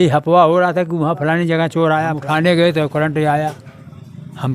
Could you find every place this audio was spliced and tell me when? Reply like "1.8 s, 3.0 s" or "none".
2.2 s

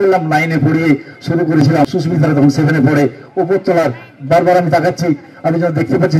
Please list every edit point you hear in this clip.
1.9 s

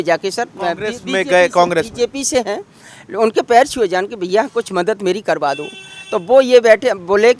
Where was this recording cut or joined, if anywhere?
none

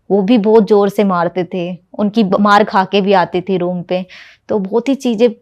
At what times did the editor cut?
none

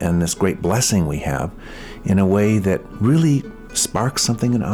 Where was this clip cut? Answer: 2.9 s

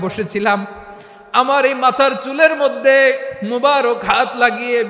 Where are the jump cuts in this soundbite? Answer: none

